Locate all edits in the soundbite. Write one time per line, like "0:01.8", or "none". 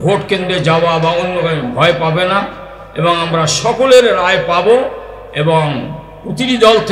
none